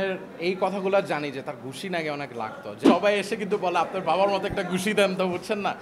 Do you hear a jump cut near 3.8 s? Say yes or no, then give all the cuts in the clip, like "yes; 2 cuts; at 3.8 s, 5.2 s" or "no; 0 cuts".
no; 1 cut; at 2.6 s